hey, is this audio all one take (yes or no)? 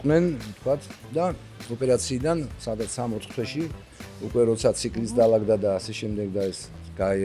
yes